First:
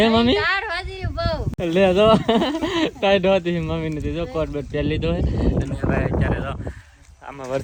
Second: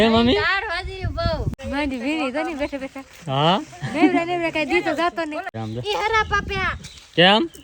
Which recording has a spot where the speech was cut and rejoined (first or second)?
second